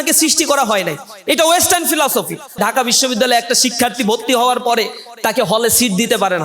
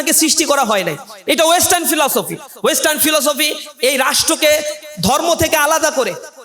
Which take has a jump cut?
first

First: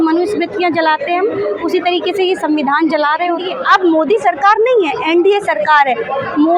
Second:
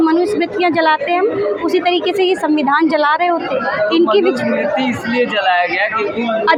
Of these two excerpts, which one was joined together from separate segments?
first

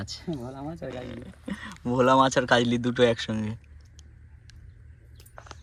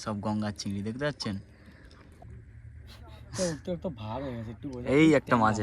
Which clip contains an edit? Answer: second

